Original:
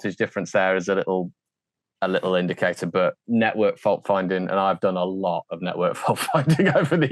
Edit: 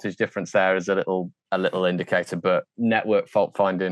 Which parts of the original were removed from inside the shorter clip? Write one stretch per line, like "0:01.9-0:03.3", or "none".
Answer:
0:01.4-0:01.9